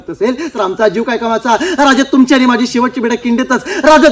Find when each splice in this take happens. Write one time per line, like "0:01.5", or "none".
none